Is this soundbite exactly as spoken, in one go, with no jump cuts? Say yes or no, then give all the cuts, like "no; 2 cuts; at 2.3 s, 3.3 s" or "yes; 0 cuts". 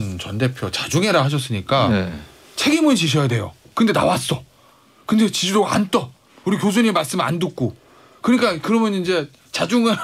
yes; 0 cuts